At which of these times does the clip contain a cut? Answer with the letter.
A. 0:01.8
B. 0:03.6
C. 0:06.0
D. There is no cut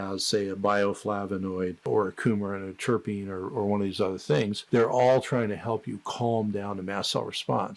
A